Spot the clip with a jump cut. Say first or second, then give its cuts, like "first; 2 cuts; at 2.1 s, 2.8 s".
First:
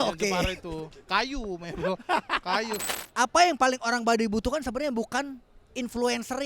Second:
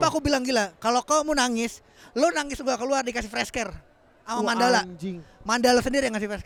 first; 1 cut; at 2.9 s